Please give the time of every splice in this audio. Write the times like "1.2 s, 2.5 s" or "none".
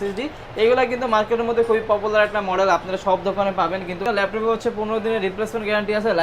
4.0 s